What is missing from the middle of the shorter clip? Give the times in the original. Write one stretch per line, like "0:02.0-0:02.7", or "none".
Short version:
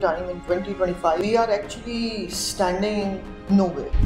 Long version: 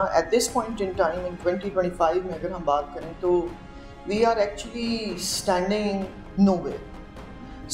0:02.2-0:04.1